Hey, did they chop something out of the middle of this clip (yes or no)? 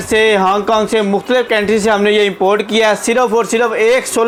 no